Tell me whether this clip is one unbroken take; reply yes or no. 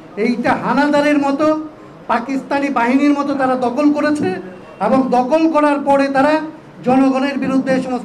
yes